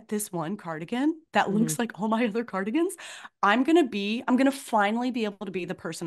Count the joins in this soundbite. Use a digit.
0